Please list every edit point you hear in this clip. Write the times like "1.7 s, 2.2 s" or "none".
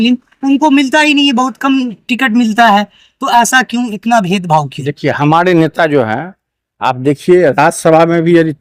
none